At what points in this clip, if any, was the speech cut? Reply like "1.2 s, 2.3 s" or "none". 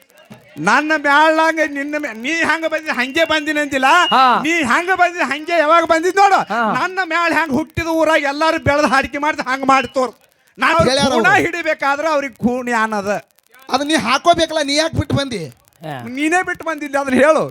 10.7 s